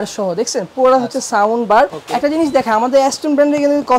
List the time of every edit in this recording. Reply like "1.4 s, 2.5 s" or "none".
2.0 s